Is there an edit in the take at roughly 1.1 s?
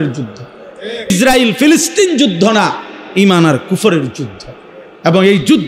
yes; 1 cut; at 1.1 s

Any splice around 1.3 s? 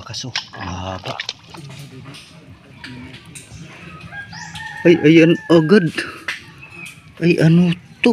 yes; 1 cut; at 1.3 s

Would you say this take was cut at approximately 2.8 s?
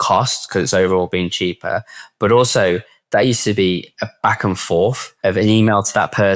no; 1 cut; at 5.1 s

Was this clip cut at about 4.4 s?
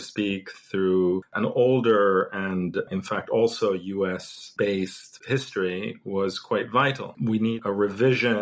yes; 4 cuts; at 1.3 s, 4.4 s, 5.1 s, 7.1 s

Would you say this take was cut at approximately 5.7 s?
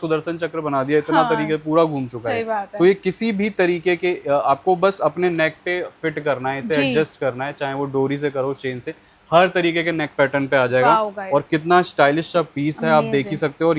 no; 0 cuts

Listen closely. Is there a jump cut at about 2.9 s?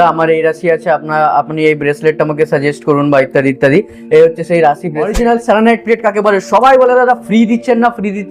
no; 1 cut; at 5.1 s

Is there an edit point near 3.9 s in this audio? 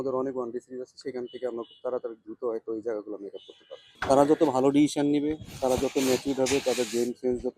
yes; 1 cut; at 3.9 s

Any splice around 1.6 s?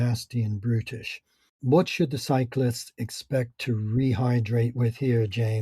yes; 1 cut; at 1.6 s

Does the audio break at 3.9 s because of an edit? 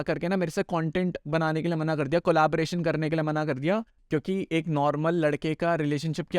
yes; 1 cut; at 3.9 s

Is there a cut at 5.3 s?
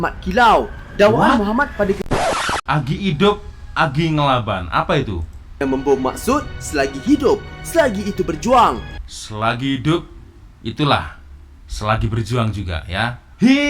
no; 1 cut; at 2.5 s

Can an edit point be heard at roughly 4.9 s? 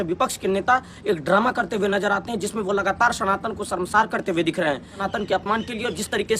yes; 1 cut; at 4.9 s

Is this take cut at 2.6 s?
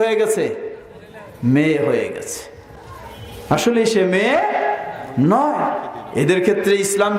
no; 0 cuts

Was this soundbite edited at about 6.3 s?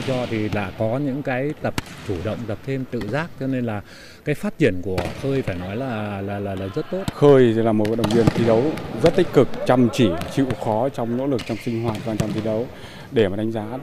yes; 1 cut; at 6.3 s

